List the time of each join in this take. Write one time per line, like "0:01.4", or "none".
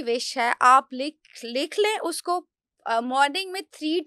none